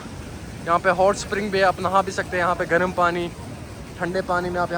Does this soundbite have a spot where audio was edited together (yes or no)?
no